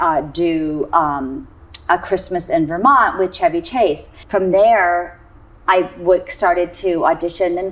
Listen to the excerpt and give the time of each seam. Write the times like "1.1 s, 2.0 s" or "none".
4.2 s